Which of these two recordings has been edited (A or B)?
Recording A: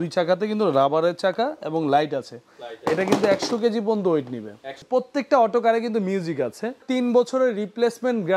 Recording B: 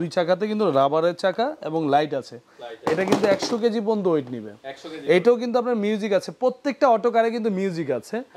A